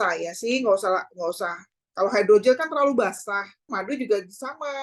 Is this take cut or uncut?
cut